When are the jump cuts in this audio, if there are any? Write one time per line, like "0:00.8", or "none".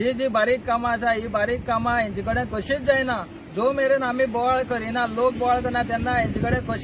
none